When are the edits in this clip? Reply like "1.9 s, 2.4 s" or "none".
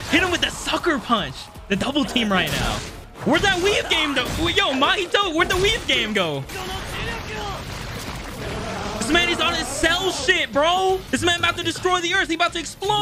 6.5 s, 11.0 s